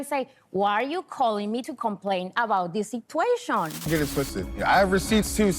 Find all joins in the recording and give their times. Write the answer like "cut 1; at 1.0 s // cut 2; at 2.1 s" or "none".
cut 1; at 3.8 s